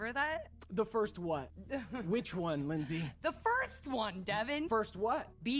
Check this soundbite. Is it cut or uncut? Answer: cut